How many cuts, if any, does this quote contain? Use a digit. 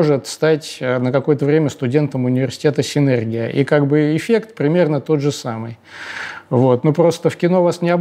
0